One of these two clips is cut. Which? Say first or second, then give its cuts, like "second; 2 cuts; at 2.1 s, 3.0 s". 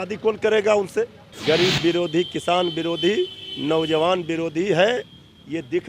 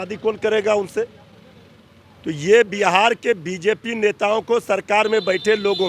first; 1 cut; at 1.2 s